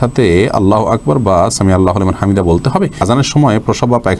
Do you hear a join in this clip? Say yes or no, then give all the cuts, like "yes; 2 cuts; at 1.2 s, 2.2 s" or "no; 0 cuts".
yes; 1 cut; at 3.0 s